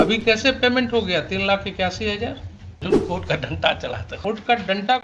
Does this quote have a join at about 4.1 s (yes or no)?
yes